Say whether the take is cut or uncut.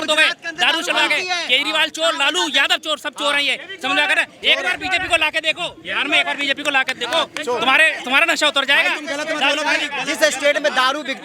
uncut